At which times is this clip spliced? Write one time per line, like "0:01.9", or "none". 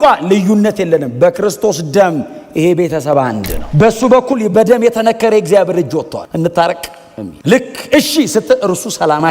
0:03.6
0:06.2

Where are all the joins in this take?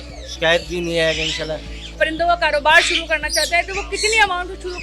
0:01.8

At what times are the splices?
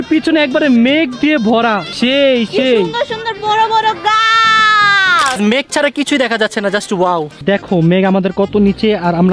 0:01.9
0:05.4
0:07.4

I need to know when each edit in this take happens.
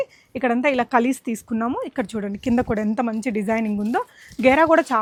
none

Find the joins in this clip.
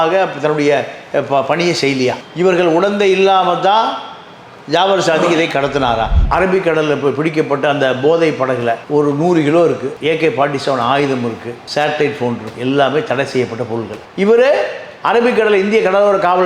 0:06.2

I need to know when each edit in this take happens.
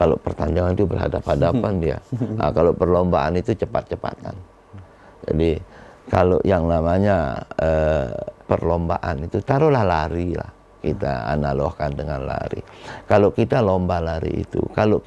none

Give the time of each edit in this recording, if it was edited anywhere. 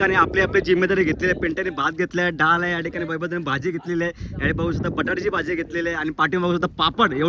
none

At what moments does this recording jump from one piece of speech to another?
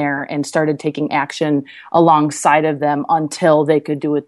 none

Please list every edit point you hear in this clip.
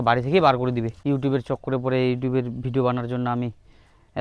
0:00.9

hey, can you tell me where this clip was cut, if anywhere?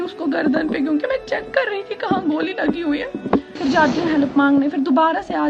0:03.6

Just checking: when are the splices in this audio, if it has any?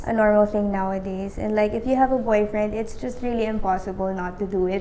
none

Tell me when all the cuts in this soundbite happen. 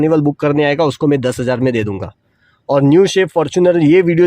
none

